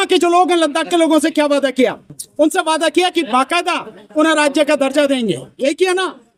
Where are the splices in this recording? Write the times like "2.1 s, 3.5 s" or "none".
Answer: none